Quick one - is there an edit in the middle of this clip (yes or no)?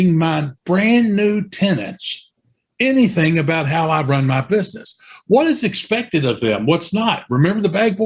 no